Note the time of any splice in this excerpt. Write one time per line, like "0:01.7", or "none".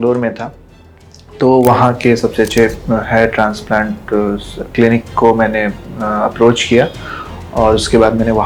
none